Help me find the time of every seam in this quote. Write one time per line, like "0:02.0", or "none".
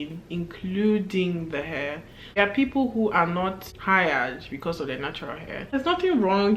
0:02.3
0:03.7
0:05.7